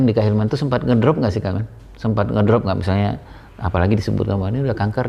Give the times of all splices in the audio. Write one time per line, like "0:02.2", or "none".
none